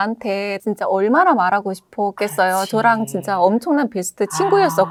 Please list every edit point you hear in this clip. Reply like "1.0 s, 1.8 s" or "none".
none